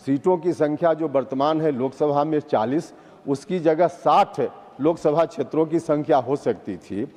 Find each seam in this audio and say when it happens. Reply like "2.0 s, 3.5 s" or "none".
none